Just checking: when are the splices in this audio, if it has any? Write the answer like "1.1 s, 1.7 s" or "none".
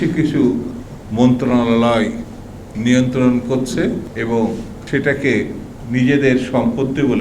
4.1 s, 4.8 s